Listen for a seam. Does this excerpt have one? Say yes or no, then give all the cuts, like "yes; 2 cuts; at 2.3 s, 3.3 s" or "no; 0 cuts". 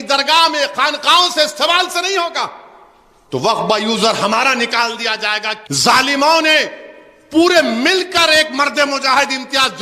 yes; 1 cut; at 5.6 s